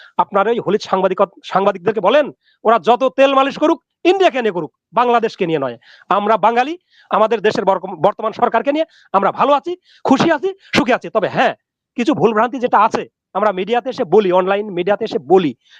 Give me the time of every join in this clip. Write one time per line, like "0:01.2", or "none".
none